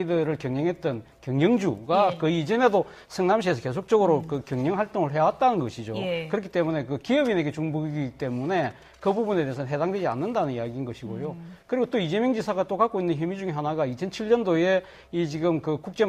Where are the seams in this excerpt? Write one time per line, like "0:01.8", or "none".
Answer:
none